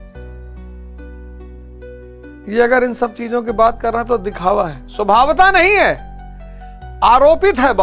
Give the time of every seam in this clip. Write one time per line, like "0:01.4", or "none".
0:02.5